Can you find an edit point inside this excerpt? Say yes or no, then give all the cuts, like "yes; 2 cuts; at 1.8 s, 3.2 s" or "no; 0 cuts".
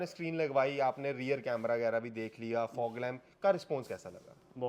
no; 0 cuts